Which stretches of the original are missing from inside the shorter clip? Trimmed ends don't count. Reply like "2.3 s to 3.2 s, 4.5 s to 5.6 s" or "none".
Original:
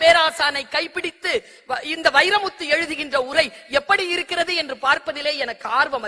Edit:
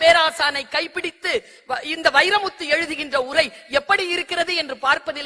none